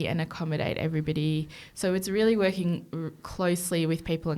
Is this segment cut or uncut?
uncut